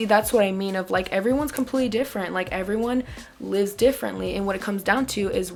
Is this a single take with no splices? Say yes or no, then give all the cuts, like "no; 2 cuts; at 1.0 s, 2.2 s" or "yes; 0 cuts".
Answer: yes; 0 cuts